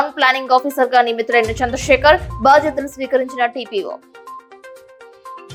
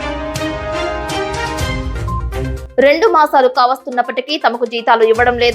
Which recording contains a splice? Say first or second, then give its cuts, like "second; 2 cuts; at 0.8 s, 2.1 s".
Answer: second; 1 cut; at 2.6 s